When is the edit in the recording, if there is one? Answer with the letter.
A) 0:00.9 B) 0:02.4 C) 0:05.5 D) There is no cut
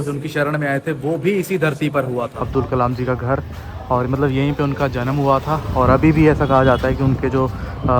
B